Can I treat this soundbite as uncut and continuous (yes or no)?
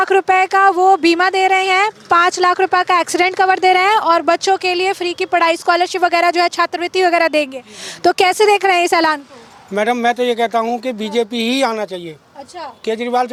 yes